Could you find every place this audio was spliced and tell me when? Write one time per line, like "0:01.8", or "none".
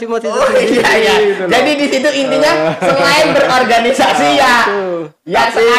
none